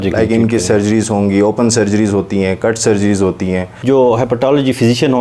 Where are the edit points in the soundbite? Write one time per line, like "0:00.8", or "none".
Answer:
0:03.7